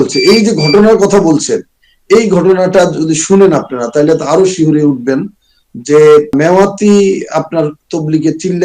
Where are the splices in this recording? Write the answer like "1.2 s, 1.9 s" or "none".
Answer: none